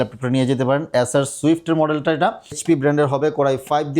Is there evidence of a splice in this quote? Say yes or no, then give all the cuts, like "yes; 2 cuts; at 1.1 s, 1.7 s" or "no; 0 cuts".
yes; 1 cut; at 2.6 s